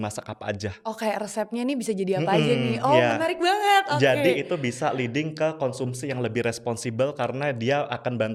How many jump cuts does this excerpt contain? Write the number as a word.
zero